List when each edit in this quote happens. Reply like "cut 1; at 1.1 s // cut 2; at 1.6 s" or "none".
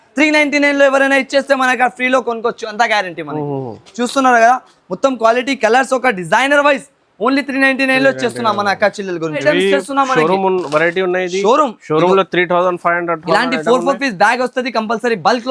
cut 1; at 9.4 s